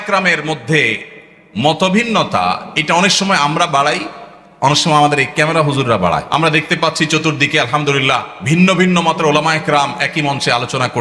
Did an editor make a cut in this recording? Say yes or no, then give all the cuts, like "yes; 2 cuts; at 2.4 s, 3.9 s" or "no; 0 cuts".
yes; 2 cuts; at 6.3 s, 8.3 s